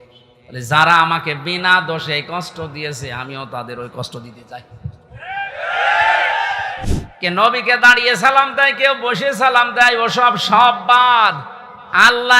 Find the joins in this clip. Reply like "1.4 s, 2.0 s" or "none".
6.8 s

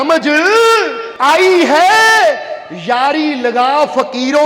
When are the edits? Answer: 1.0 s

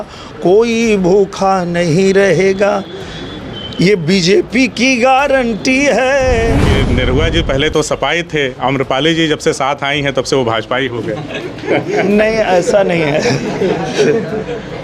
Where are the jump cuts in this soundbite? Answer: 6.7 s

